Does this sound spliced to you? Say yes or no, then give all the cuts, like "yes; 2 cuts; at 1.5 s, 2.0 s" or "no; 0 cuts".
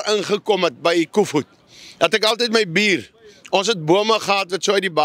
no; 0 cuts